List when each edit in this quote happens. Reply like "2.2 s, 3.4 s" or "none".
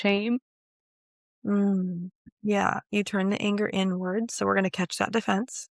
2.3 s

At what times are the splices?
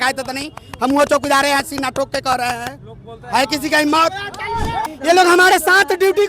4.8 s

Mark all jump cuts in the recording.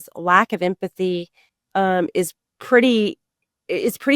none

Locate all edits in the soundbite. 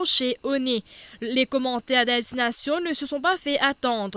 none

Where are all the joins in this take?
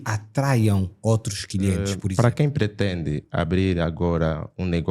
2.0 s

